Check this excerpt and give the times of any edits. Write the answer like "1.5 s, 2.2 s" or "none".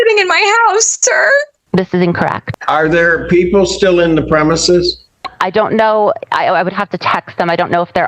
2.4 s